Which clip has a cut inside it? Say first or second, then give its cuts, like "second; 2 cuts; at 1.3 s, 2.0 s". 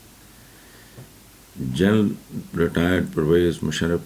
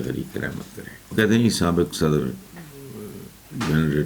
second; 1 cut; at 1.1 s